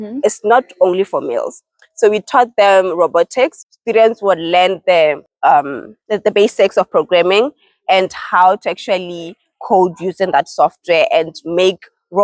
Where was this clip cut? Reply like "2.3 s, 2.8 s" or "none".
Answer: 3.7 s, 5.3 s